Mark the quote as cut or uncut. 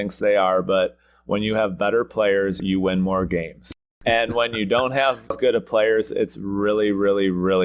cut